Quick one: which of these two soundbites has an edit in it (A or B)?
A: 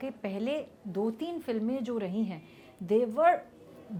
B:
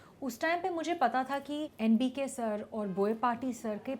B